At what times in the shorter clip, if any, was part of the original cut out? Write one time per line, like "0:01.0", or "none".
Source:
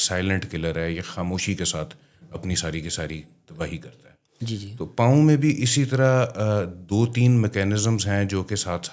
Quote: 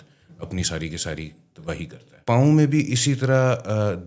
0:02.2